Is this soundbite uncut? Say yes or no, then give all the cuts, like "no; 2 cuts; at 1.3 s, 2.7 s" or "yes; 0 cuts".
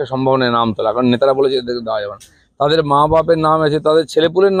yes; 0 cuts